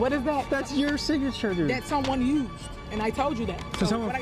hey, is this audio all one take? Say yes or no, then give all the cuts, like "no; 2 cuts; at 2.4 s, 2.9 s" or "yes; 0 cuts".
yes; 0 cuts